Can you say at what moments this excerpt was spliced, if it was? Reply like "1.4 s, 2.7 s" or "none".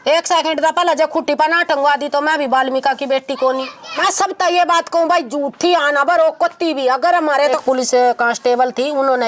4.0 s, 7.6 s